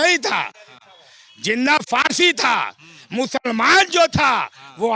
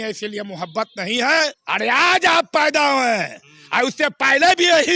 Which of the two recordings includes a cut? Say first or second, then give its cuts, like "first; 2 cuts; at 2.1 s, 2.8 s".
second; 1 cut; at 1.6 s